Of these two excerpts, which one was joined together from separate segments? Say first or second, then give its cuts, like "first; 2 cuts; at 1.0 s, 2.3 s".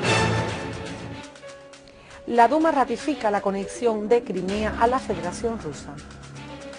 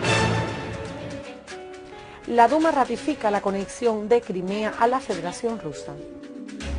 first; 1 cut; at 5.7 s